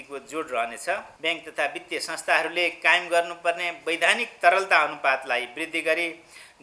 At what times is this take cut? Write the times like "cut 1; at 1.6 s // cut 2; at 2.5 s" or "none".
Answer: cut 1; at 1.1 s